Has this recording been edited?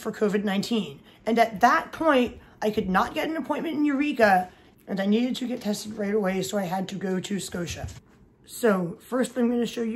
no; 0 cuts

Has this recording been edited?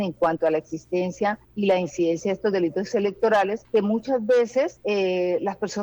yes; 3 cuts; at 1.5 s, 3.6 s, 4.8 s

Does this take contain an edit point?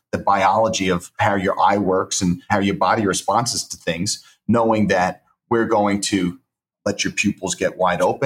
yes; 3 cuts; at 1.1 s, 2.4 s, 6.7 s

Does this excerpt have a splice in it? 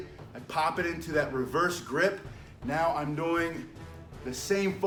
no; 0 cuts

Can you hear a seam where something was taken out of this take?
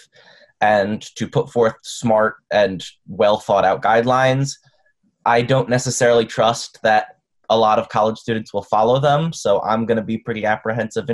no; 0 cuts

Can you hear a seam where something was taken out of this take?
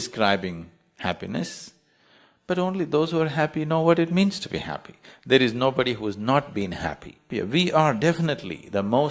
yes; 1 cut; at 7.2 s

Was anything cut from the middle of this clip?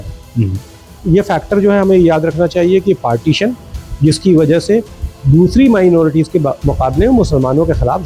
yes; 1 cut; at 1.0 s

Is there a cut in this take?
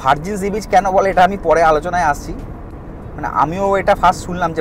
no; 0 cuts

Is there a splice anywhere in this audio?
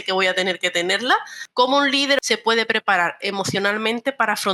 yes; 2 cuts; at 1.4 s, 2.2 s

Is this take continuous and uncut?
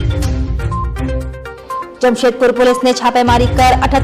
yes; 0 cuts

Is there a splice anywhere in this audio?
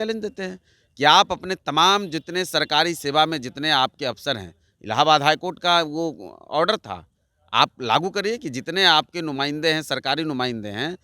no; 0 cuts

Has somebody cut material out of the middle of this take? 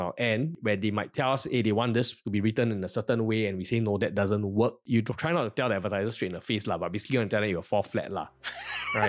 no; 0 cuts

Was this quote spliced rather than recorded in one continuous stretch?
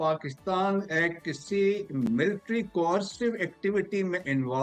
no; 0 cuts

